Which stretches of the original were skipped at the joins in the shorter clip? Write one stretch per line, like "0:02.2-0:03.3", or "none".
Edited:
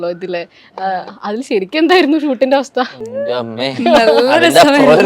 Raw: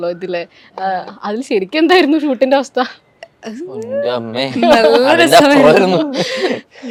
0:03.0-0:03.8